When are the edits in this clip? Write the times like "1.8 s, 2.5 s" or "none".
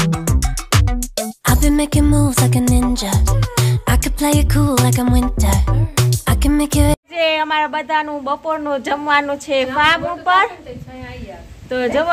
6.9 s